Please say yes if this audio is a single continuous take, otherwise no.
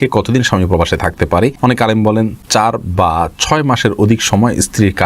no